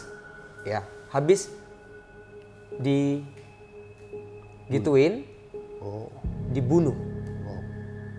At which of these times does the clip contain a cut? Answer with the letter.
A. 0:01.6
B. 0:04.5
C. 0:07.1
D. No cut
C